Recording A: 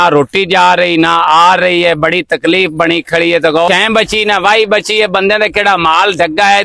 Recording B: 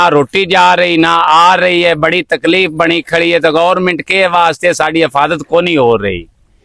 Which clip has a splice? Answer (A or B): A